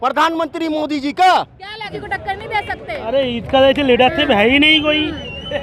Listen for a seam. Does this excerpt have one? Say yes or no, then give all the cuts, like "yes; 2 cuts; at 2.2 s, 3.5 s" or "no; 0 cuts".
no; 0 cuts